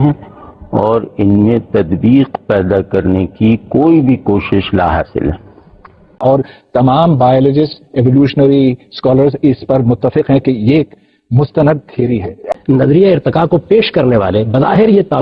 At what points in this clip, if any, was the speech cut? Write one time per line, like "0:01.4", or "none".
0:06.2
0:12.5